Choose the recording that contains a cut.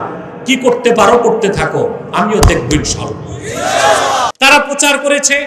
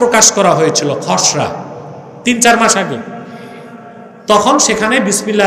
first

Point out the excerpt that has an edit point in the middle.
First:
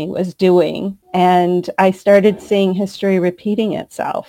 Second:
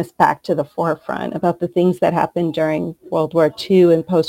first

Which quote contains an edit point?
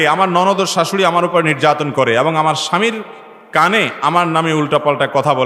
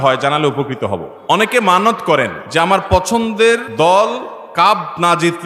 second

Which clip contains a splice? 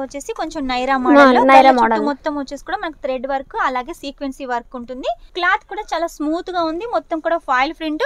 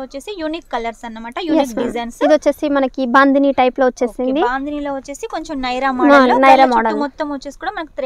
first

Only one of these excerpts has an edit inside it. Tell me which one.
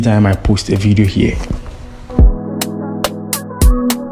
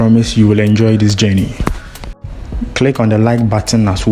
first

